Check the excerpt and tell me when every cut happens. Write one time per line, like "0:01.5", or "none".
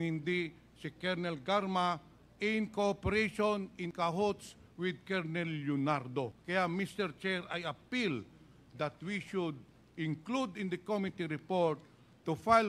0:06.4